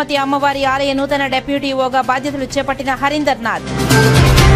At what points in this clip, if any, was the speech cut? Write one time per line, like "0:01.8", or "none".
none